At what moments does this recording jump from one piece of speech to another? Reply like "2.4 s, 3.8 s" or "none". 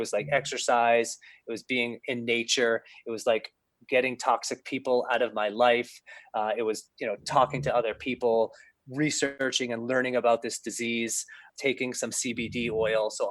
9.3 s, 11.5 s